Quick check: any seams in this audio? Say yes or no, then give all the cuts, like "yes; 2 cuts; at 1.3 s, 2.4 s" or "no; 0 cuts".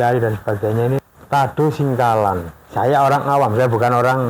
yes; 2 cuts; at 1.1 s, 2.6 s